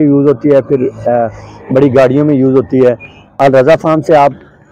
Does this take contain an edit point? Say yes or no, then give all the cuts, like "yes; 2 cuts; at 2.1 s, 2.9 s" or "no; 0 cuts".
yes; 1 cut; at 3.2 s